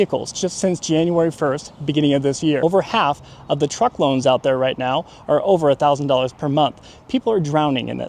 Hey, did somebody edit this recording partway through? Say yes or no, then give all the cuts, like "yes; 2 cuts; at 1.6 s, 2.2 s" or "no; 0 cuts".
yes; 1 cut; at 2.6 s